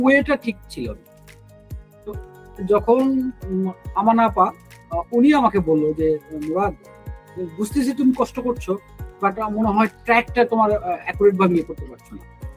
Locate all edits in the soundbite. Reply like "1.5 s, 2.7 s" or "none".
none